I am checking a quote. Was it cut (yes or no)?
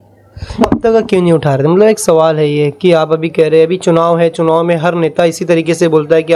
no